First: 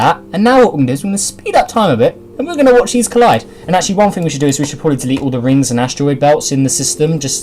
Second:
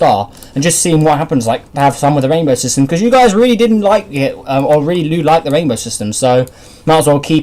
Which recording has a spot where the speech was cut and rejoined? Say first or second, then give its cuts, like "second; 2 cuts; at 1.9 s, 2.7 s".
second; 1 cut; at 3.9 s